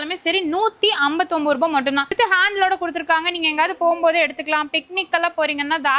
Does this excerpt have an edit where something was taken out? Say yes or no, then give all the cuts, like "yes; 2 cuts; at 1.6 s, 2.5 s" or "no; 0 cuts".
yes; 1 cut; at 2.1 s